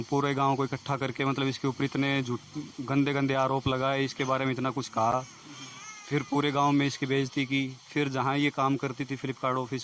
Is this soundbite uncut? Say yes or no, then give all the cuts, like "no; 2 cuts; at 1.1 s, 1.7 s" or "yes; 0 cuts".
yes; 0 cuts